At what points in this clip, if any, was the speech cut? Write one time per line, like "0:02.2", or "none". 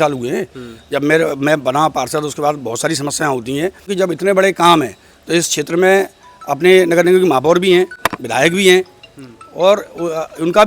0:03.9

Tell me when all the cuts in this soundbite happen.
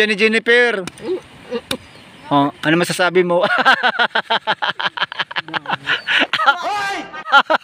0:06.5

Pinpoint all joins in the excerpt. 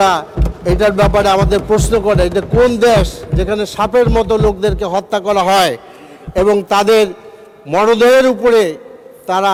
none

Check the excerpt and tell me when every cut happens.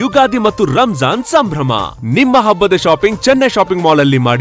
none

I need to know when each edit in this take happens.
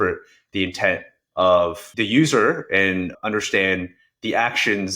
0:01.9
0:03.1

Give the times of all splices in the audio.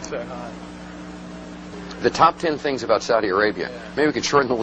0:03.2

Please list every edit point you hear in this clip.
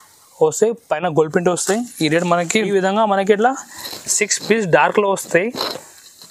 0:02.5

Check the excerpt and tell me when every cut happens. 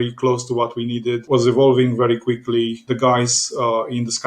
0:01.2
0:02.8

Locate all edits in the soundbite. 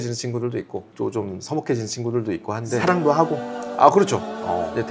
none

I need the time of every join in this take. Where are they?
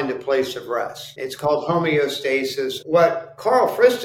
0:01.0
0:02.8

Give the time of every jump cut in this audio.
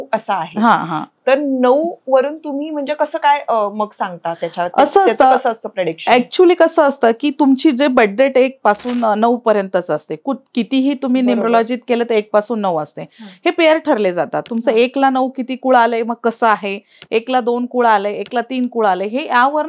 0:01.1

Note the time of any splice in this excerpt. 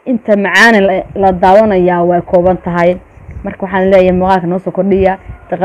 none

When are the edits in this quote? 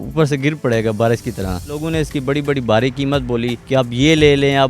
0:01.8
0:03.6

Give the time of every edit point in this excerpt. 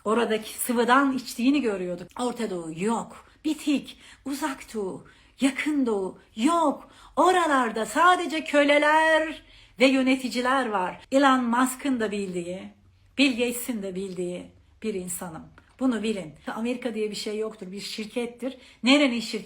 0:02.0
0:11.0
0:16.4

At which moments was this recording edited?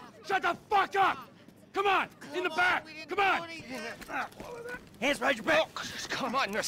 0:03.7

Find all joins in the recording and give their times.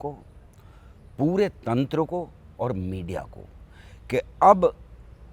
none

